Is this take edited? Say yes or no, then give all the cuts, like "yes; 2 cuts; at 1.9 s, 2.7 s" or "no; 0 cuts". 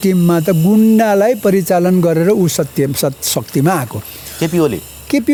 no; 0 cuts